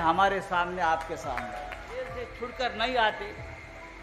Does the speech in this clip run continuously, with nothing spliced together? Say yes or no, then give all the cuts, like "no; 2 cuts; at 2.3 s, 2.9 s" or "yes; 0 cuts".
no; 1 cut; at 2.1 s